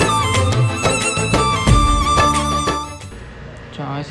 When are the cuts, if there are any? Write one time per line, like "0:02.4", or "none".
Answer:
none